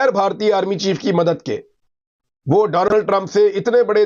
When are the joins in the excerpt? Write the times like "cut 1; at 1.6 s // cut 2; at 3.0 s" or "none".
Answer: none